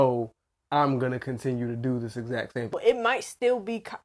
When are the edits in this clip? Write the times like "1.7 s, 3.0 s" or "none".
2.7 s